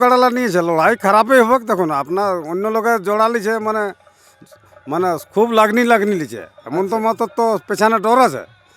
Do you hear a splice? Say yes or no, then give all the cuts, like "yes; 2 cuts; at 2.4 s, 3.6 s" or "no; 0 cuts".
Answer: no; 0 cuts